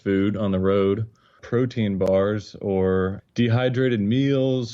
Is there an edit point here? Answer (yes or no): yes